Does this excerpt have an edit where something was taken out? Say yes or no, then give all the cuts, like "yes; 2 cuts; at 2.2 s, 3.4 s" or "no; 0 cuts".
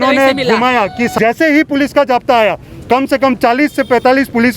yes; 1 cut; at 1.1 s